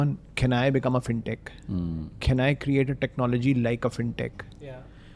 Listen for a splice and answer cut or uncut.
uncut